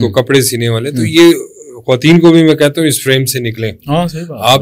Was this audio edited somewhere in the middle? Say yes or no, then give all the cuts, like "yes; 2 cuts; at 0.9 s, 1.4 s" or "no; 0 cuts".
no; 0 cuts